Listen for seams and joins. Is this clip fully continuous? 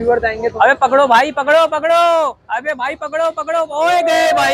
yes; 0 cuts

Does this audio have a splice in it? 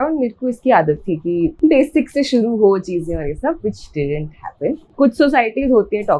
yes; 2 cuts; at 1.5 s, 4.9 s

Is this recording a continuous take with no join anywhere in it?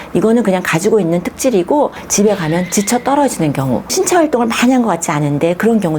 no; 2 cuts; at 2.0 s, 3.9 s

